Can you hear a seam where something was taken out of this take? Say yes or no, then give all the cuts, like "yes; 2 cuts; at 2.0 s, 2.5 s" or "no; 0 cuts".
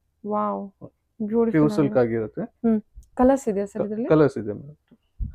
no; 0 cuts